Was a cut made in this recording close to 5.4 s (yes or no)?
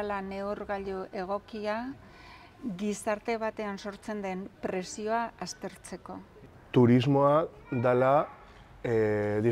no